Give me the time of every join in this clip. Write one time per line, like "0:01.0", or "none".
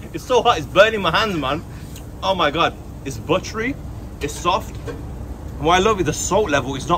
none